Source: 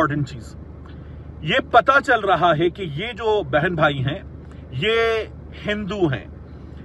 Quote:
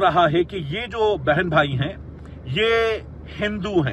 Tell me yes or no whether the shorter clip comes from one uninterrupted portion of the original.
yes